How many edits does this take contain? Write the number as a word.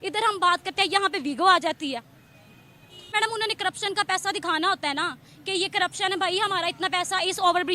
one